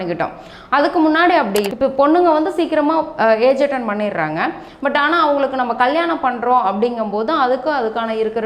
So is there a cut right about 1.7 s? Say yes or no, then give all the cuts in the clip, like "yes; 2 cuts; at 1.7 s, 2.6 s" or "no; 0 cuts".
yes; 1 cut; at 1.7 s